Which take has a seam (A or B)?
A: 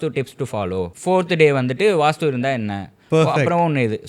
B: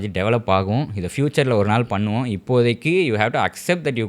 A